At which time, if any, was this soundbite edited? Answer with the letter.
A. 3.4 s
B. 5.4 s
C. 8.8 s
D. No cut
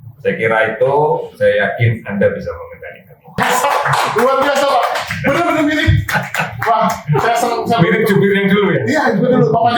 A